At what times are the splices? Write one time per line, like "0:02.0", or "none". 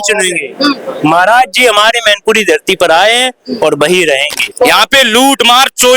0:04.4